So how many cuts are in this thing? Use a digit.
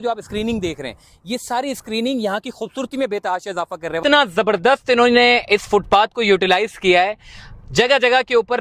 1